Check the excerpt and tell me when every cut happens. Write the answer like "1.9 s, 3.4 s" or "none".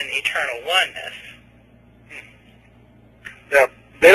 2.9 s